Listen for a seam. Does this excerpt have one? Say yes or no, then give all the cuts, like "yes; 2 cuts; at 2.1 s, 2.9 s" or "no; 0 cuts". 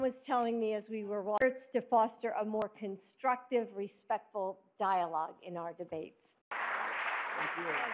no; 0 cuts